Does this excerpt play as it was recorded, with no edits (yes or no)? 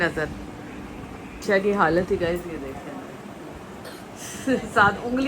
no